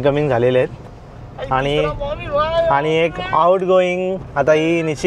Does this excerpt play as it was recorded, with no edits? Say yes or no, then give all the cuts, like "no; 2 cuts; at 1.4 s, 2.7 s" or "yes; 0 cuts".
yes; 0 cuts